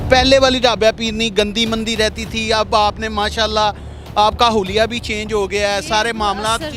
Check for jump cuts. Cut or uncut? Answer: uncut